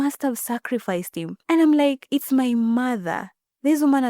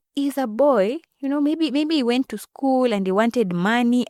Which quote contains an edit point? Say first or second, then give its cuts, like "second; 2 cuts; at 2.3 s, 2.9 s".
first; 1 cut; at 1.3 s